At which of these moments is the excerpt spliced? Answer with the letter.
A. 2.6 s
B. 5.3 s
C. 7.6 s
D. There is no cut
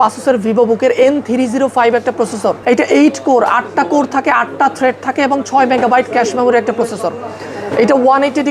A